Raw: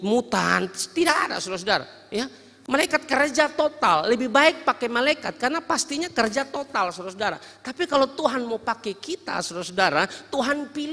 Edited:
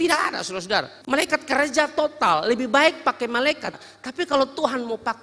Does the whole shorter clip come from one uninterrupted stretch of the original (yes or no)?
no